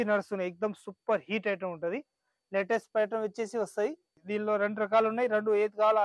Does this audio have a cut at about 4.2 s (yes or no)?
yes